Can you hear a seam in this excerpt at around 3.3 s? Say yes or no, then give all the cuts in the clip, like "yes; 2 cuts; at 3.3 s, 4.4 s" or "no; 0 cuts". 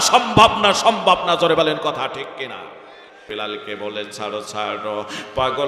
yes; 1 cut; at 3.3 s